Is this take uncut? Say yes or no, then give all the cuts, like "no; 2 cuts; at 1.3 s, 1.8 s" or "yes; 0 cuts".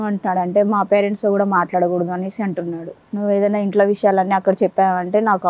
no; 1 cut; at 3.0 s